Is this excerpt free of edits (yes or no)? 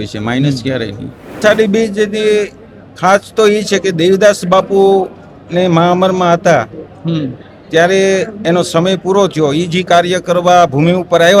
no